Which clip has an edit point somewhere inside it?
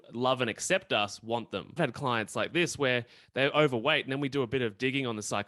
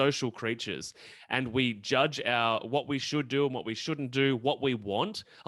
first; 1 cut; at 1.8 s

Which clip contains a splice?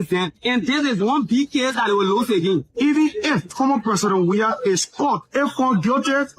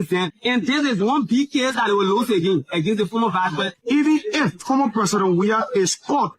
first; 2 cuts; at 2.7 s, 5.2 s

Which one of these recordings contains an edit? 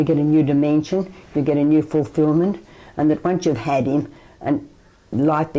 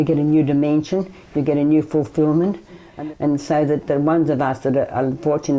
second; 1 cut; at 2.9 s

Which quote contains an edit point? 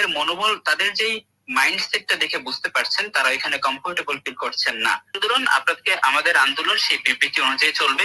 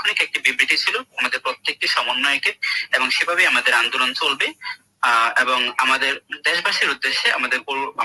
first; 1 cut; at 5.2 s

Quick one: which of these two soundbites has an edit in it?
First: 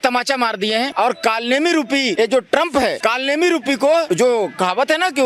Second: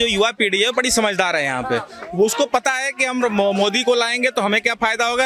first; 4 cuts; at 0.9 s, 2.1 s, 3.0 s, 4.1 s

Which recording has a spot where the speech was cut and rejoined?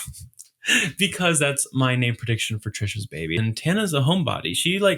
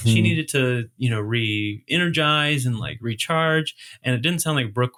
first; 1 cut; at 3.4 s

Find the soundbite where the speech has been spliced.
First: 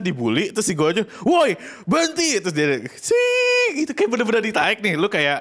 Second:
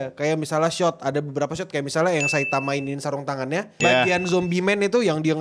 second; 1 cut; at 3.8 s

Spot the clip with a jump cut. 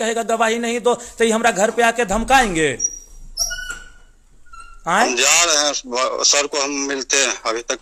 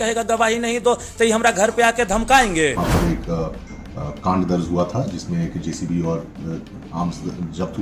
second; 1 cut; at 2.8 s

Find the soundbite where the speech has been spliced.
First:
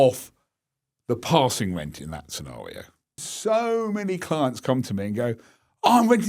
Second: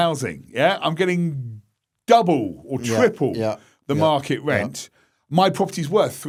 first; 1 cut; at 3.3 s

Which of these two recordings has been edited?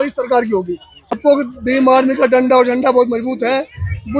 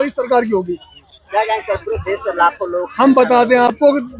first; 1 cut; at 1.2 s

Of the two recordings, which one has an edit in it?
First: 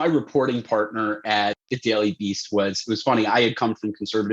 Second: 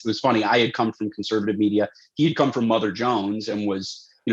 first; 1 cut; at 1.6 s

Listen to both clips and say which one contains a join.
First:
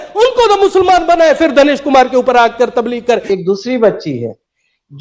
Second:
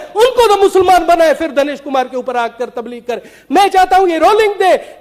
first; 1 cut; at 3.2 s

